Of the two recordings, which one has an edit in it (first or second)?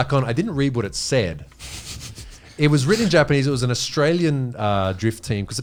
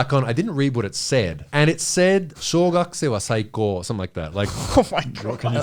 second